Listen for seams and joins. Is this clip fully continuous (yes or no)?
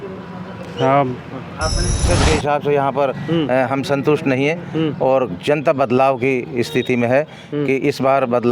no